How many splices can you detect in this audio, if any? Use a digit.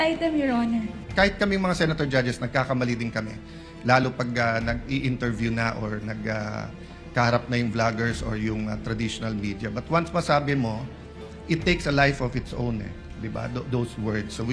1